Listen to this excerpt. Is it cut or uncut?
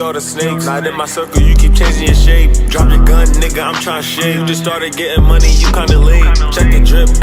uncut